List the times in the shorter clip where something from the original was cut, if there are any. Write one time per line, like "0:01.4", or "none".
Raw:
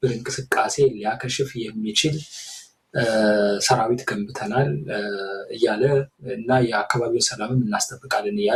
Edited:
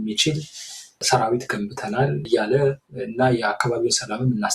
0:01.0
0:02.2